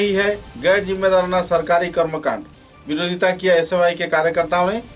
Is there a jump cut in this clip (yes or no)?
no